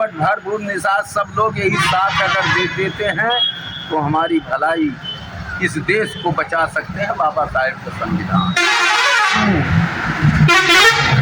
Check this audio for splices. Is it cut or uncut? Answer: uncut